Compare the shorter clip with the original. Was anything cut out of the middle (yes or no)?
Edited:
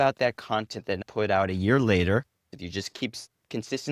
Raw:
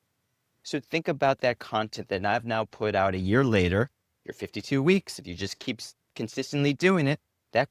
yes